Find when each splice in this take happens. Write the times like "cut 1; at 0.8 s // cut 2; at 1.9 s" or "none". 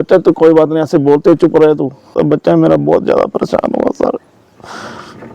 cut 1; at 2.1 s